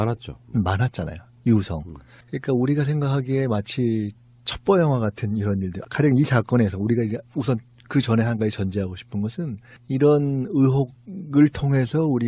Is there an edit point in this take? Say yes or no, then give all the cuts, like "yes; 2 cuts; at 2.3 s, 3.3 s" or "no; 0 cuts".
no; 0 cuts